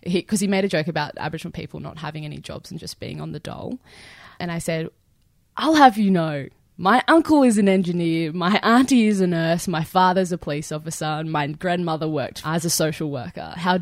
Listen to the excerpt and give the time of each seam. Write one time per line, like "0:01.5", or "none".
0:04.3
0:12.4